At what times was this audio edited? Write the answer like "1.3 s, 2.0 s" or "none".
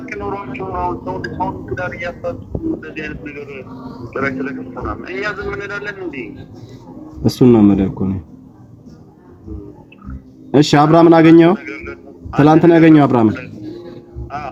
none